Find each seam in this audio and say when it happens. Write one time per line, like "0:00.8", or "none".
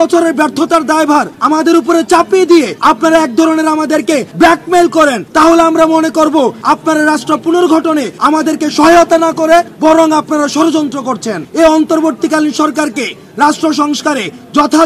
0:01.3
0:02.7
0:04.3
0:05.2
0:06.6
0:08.1
0:09.7
0:11.4